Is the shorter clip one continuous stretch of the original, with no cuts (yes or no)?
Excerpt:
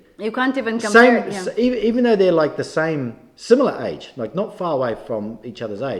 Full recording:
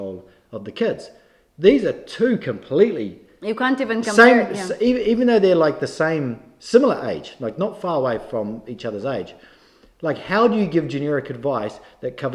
yes